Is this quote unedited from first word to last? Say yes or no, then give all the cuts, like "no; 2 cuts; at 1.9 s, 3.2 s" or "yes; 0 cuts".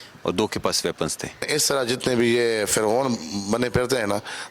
no; 1 cut; at 1.5 s